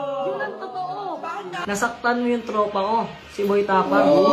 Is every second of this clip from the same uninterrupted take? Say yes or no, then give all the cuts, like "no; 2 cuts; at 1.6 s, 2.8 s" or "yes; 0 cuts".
no; 1 cut; at 1.6 s